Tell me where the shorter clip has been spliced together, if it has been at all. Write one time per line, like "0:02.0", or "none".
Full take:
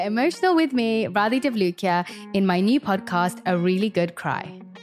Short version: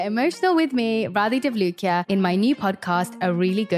0:02.0